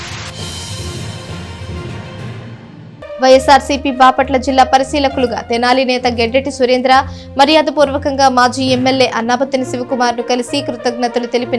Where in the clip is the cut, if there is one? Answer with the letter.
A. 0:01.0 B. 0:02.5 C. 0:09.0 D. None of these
B